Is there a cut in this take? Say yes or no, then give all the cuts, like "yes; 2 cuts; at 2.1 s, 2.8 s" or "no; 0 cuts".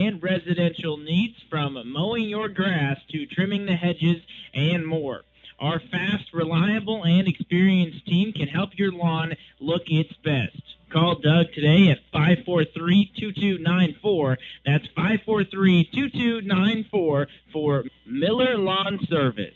no; 0 cuts